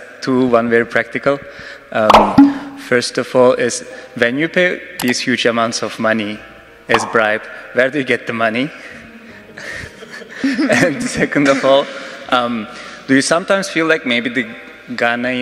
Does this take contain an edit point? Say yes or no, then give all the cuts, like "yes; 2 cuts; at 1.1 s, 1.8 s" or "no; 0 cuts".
yes; 2 cuts; at 2.1 s, 2.7 s